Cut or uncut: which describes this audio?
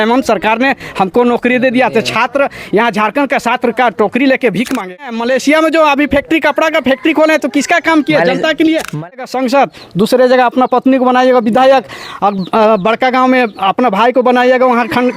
cut